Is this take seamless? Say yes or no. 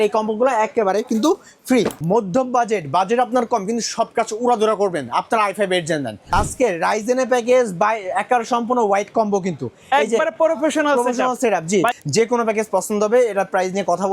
no